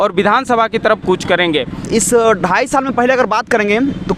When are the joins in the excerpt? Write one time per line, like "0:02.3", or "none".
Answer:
0:01.8

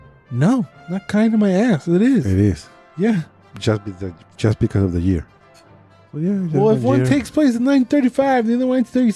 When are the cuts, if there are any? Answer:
none

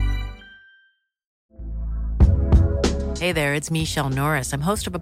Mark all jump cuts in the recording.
0:01.3

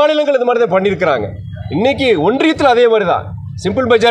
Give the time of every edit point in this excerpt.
none

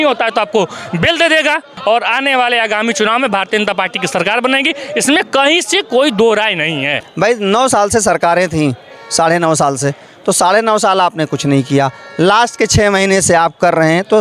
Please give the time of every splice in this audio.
0:01.7
0:07.0

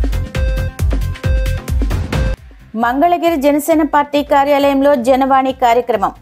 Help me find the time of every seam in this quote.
0:01.0

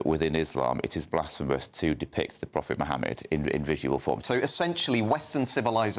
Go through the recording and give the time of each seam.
0:04.2

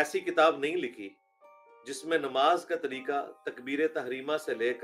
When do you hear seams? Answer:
none

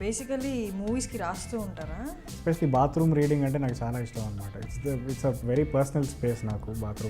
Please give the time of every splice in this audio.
0:02.4

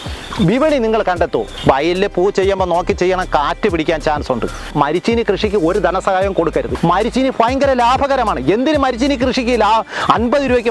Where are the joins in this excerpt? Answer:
0:01.5
0:04.7
0:06.7

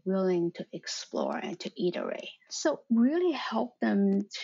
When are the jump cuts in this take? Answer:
0:02.5

